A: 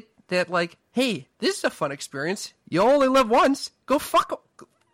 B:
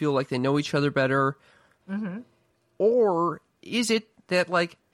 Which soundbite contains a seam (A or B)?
B